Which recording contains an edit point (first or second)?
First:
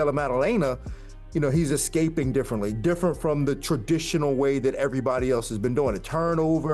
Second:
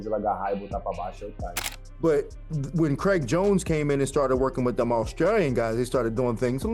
second